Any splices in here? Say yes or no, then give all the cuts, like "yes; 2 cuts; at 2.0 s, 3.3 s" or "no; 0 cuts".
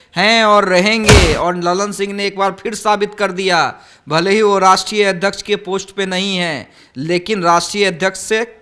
no; 0 cuts